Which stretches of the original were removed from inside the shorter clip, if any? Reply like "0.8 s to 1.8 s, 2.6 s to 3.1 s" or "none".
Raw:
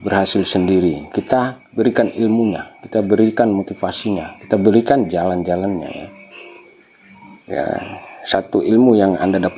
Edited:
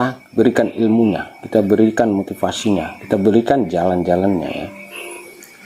none